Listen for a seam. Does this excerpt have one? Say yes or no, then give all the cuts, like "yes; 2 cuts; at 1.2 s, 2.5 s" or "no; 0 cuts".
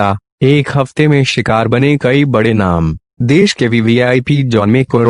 no; 0 cuts